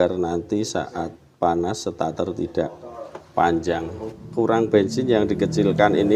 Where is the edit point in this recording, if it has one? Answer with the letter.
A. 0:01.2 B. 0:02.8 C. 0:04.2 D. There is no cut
C